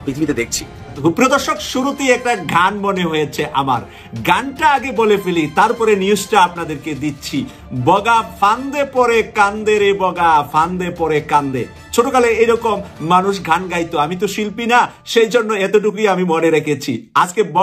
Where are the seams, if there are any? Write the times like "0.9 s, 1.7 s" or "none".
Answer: 1.0 s